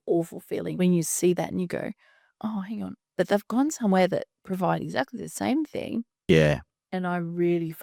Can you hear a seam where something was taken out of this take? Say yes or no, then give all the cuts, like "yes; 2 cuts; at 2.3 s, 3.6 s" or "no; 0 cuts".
no; 0 cuts